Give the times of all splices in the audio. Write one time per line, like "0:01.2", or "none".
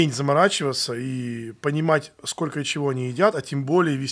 none